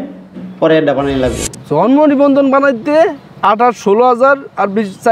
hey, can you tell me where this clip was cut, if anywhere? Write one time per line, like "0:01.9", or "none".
0:01.5

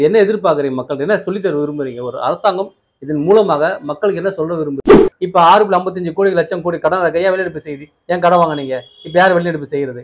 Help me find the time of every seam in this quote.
0:05.0

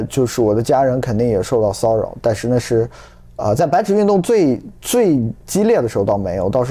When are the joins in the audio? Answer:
none

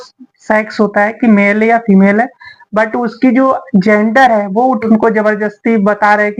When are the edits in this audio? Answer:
0:04.9

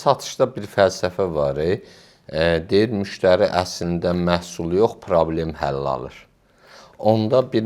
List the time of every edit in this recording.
none

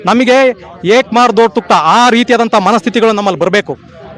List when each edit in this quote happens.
none

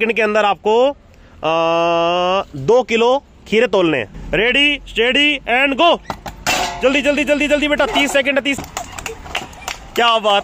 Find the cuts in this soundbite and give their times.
0:04.2
0:08.6

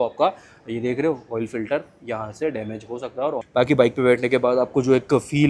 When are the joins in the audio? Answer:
0:03.4

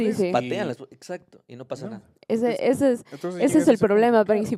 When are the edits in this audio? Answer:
none

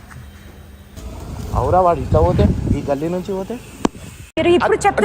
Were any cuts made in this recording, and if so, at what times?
0:00.9

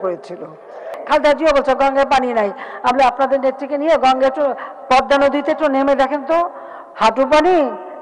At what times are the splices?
0:00.9

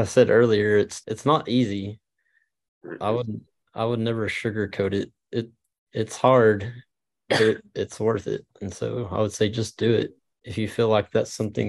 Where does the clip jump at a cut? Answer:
0:01.0
0:10.2

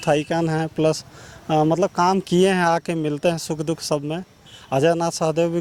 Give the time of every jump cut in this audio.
none

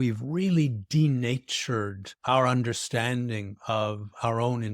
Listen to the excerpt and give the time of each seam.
0:02.1

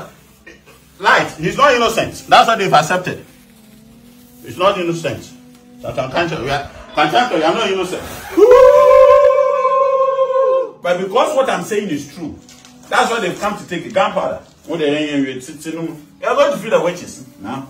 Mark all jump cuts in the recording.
0:10.8

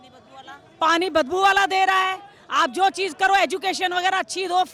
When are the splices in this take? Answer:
none

